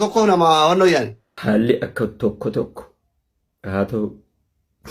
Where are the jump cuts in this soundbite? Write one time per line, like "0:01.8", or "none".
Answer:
0:01.2